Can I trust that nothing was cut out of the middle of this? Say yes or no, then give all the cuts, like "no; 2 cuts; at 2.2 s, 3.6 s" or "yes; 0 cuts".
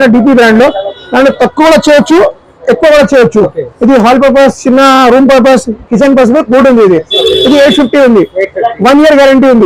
yes; 0 cuts